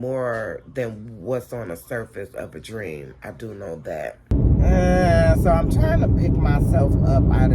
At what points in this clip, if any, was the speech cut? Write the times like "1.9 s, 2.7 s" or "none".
4.3 s